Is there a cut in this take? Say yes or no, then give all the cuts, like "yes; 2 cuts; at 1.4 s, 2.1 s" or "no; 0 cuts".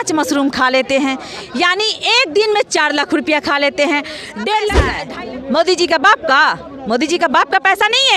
yes; 1 cut; at 4.9 s